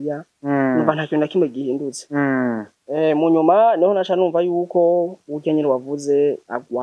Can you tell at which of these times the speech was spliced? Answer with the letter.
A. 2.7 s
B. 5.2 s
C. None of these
C